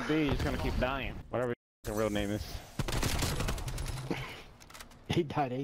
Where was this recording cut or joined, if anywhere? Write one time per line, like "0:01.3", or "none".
0:01.2